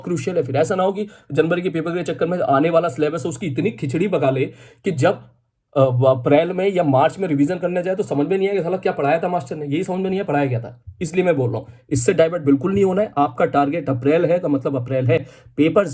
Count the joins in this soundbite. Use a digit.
0